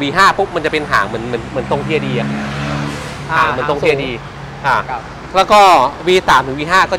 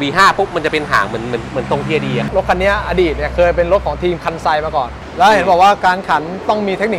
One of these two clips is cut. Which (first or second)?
second